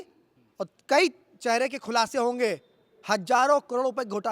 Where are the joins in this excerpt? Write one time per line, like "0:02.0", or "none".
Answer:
none